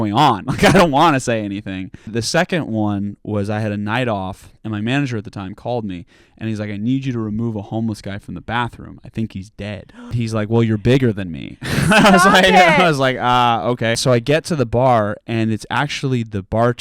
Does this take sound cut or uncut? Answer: cut